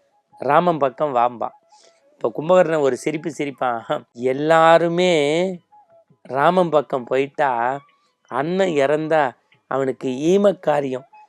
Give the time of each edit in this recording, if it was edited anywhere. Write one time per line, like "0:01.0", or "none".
0:04.1